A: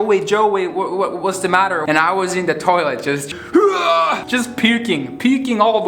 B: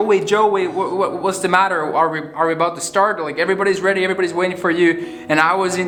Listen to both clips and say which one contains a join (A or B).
A